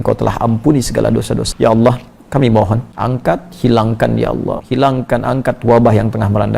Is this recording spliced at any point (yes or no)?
yes